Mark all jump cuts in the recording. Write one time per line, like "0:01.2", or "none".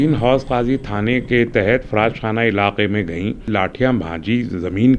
0:03.5